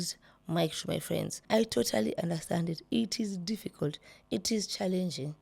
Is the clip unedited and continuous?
no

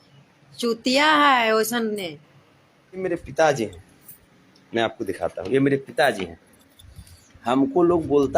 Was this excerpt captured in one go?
no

